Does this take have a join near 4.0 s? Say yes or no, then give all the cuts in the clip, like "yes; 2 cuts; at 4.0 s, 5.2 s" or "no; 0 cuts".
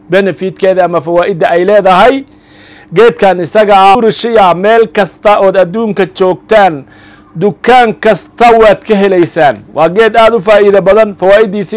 yes; 1 cut; at 4.0 s